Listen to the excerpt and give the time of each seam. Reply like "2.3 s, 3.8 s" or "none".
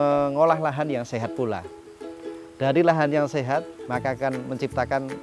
3.8 s